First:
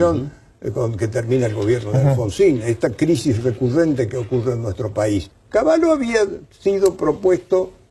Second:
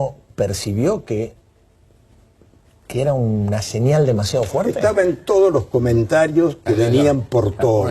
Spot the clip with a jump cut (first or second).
first